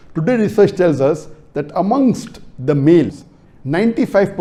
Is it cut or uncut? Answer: uncut